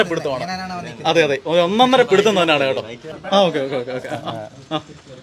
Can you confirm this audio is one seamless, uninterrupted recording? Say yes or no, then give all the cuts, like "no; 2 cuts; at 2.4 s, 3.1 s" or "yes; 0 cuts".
yes; 0 cuts